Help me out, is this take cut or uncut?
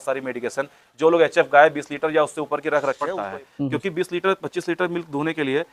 cut